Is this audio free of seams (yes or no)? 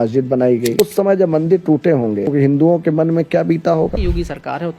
no